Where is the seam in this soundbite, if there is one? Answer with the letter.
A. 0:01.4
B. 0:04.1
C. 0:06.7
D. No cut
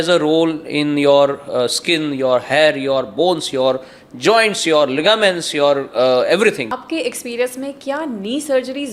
C